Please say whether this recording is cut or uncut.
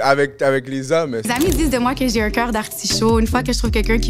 cut